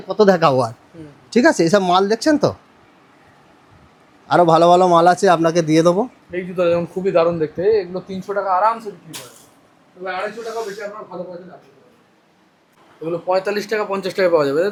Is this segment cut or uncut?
uncut